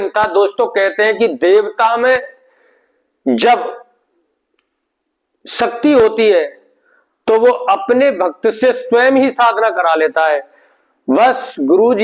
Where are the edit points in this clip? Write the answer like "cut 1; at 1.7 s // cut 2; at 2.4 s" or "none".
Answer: none